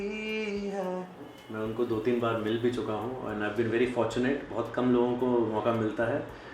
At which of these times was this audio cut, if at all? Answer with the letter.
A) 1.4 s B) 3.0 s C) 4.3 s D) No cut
A